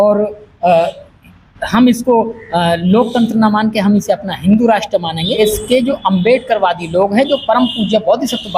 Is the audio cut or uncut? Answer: cut